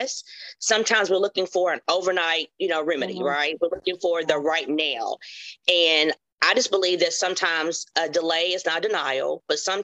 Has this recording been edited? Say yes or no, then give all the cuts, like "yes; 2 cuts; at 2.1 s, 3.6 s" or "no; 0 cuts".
no; 0 cuts